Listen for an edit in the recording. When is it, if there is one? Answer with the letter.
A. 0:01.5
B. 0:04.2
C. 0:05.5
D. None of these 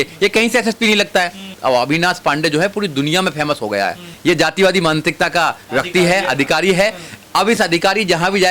A